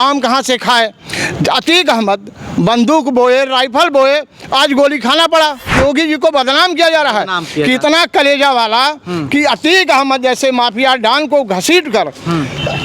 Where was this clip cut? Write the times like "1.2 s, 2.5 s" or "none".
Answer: 5.6 s